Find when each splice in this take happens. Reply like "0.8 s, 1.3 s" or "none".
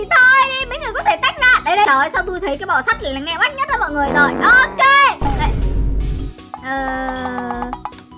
1.9 s